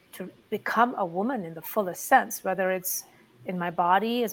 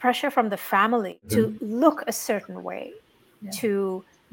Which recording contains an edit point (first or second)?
second